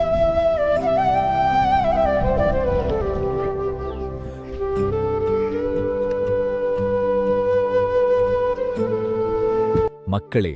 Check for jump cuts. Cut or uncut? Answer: uncut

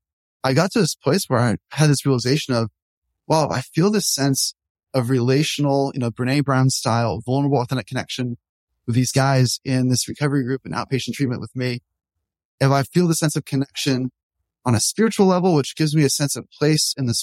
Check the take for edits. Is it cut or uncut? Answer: uncut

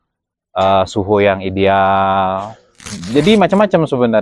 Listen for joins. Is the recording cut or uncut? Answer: cut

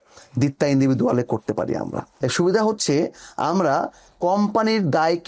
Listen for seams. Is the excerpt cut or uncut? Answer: cut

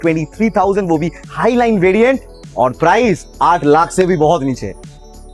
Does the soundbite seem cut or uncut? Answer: uncut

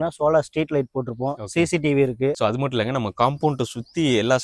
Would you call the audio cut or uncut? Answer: cut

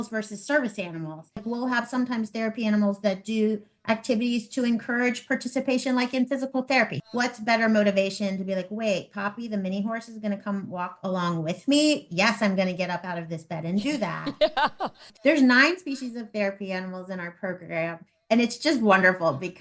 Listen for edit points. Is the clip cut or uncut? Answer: cut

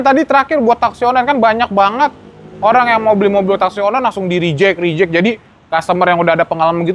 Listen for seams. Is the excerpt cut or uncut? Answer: uncut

